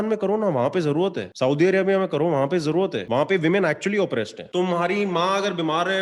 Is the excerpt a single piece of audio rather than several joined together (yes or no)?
no